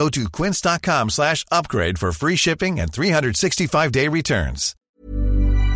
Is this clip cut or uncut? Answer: cut